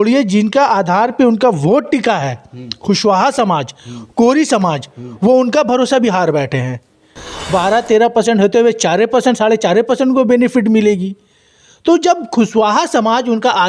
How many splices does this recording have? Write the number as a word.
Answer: one